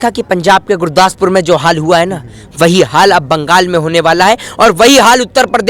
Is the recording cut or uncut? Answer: uncut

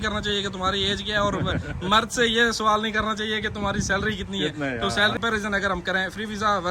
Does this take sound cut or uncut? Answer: cut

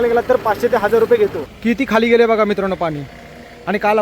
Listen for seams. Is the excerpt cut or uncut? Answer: cut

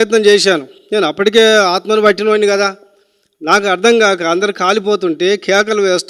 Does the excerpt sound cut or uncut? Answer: uncut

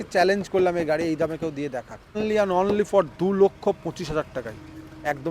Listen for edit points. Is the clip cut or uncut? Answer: cut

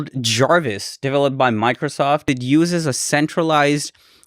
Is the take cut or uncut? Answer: cut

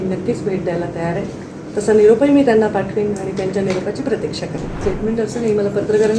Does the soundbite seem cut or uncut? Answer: cut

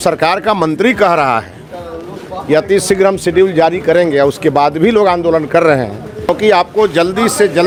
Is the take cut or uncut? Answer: uncut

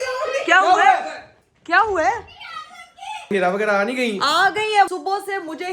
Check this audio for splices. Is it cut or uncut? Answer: cut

